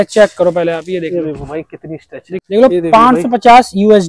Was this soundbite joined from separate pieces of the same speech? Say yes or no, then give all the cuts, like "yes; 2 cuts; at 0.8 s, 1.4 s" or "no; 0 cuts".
yes; 1 cut; at 2.4 s